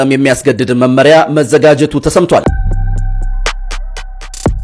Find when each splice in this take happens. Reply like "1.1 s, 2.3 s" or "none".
2.5 s